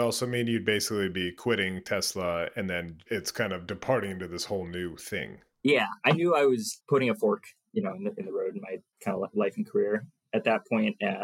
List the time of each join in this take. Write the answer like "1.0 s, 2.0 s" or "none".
10.2 s